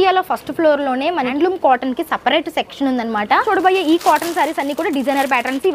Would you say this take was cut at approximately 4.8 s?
no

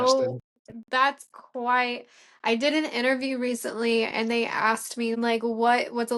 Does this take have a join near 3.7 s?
no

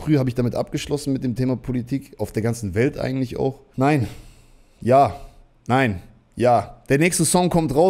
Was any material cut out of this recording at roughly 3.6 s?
yes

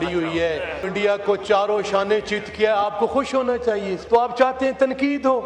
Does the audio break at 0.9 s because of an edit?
yes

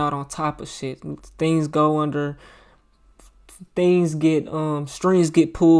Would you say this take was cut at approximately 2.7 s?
no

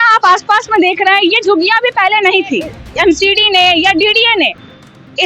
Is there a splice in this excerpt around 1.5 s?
no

